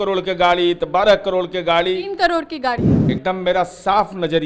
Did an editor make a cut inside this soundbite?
yes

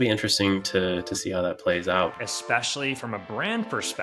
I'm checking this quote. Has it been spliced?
yes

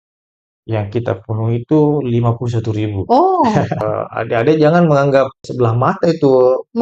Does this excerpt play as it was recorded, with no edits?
no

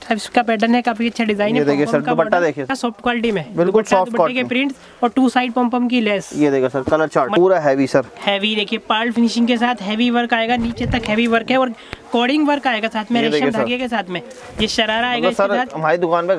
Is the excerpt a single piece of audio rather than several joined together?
no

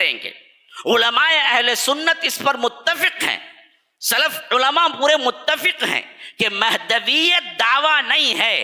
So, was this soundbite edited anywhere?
no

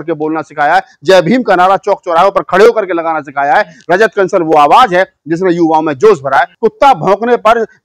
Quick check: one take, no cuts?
no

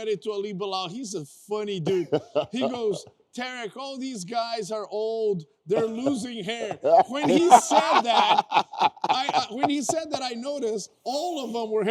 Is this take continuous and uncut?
yes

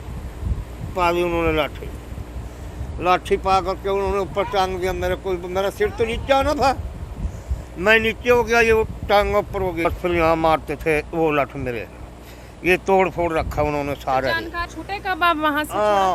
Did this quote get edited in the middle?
yes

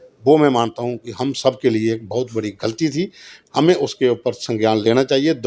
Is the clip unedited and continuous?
yes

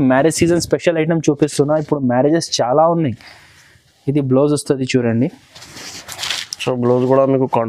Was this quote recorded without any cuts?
yes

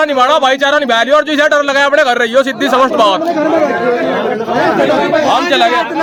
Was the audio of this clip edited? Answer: no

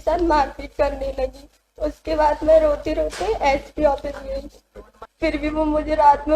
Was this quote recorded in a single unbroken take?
no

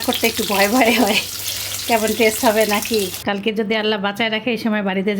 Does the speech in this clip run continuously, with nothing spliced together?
no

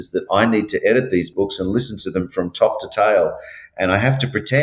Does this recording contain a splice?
yes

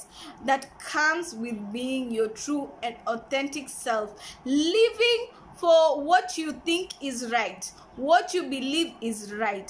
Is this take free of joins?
no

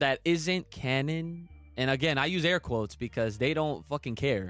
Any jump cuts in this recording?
no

